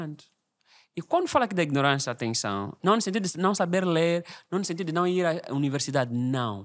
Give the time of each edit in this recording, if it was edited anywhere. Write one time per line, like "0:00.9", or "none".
0:02.7